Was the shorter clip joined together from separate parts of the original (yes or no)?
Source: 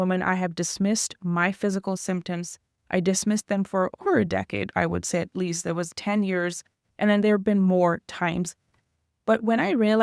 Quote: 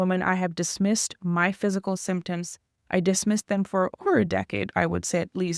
no